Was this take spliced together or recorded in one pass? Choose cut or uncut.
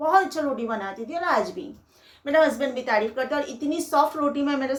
uncut